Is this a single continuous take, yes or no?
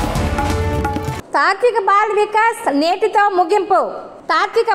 yes